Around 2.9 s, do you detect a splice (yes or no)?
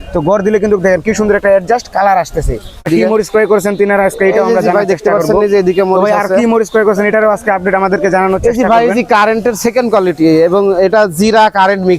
yes